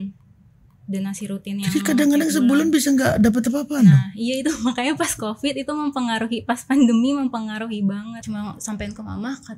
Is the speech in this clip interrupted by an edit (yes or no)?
yes